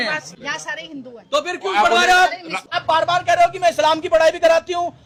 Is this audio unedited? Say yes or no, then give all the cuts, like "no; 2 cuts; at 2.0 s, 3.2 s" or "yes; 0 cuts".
yes; 0 cuts